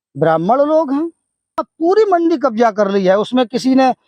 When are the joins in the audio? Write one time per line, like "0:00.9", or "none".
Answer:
0:01.7